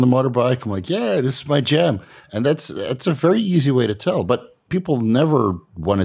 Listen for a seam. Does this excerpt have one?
no; 0 cuts

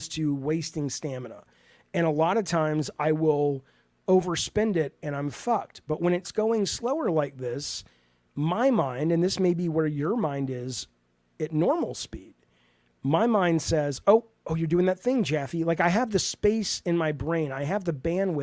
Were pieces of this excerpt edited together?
no; 0 cuts

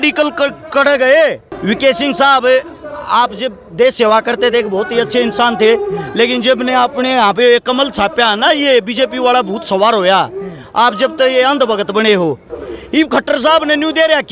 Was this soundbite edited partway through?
yes; 2 cuts; at 1.5 s, 12.5 s

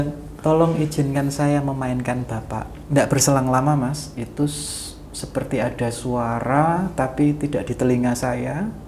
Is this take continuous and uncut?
no; 1 cut; at 2.7 s

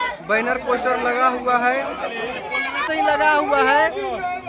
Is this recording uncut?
no; 1 cut; at 2.9 s

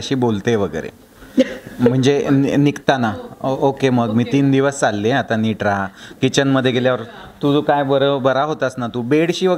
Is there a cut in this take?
no; 0 cuts

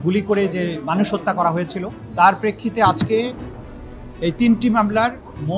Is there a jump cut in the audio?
yes; 1 cut; at 2.0 s

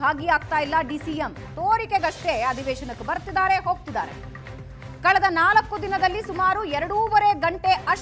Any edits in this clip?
no; 0 cuts

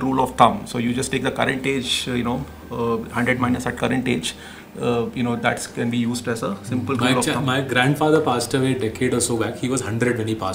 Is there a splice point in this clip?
no; 0 cuts

